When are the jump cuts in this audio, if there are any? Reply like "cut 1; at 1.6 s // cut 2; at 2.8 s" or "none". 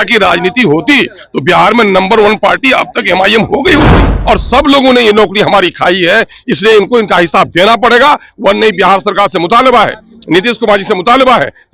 cut 1; at 4.1 s